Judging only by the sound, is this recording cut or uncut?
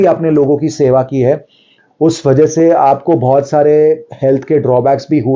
uncut